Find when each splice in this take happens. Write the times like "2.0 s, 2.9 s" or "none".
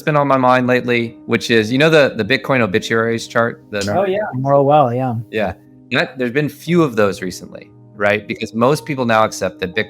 1.1 s, 3.7 s